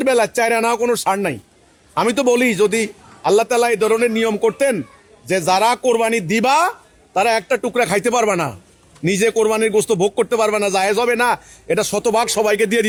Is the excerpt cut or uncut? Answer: uncut